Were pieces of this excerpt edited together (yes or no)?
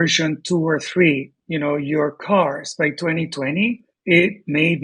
no